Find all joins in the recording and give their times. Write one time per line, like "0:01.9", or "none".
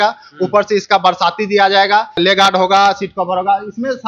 0:02.2

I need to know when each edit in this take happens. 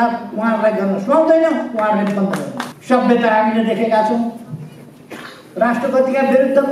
0:02.7

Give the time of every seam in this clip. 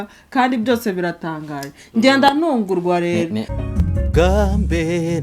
0:03.5

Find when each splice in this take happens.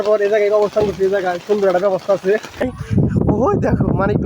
0:02.6

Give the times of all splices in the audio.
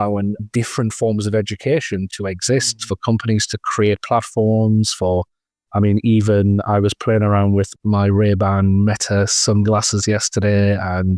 0:02.1

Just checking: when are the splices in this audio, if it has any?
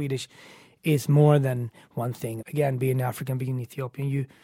0:02.3

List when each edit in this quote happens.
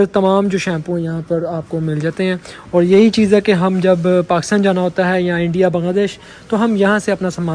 none

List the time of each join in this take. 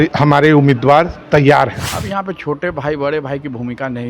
0:01.8

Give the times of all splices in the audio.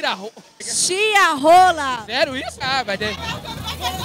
none

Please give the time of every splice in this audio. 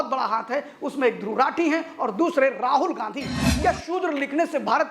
0:03.4

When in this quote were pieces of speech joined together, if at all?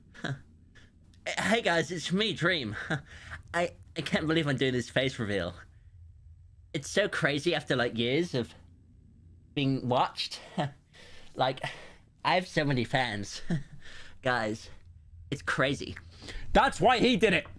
none

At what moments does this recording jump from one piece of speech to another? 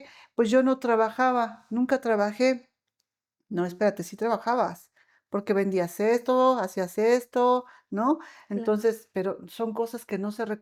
none

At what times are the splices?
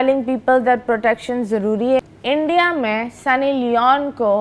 0:02.0

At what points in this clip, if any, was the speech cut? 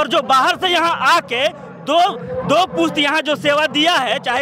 none

